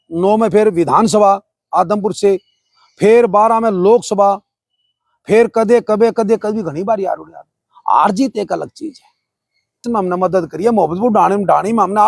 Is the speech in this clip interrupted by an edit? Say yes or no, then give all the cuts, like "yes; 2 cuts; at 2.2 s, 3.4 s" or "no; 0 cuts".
yes; 1 cut; at 9.8 s